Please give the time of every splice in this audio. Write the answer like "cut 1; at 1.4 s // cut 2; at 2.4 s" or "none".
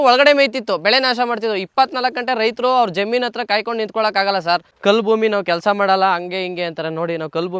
cut 1; at 4.7 s